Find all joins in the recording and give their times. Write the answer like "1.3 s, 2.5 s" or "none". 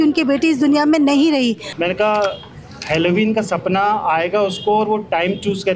1.7 s